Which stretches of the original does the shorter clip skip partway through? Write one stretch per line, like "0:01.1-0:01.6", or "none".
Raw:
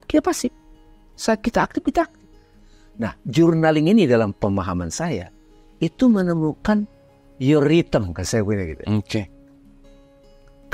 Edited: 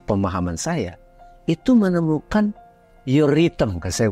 none